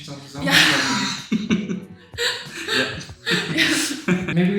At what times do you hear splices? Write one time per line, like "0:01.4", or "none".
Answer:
none